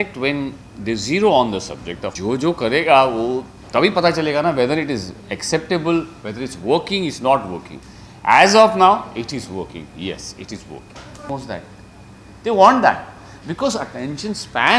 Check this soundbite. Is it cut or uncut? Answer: cut